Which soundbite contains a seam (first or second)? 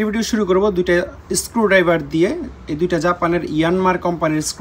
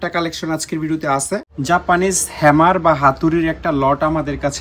second